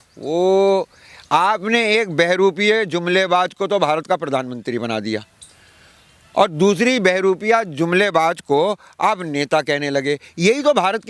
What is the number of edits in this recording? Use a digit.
0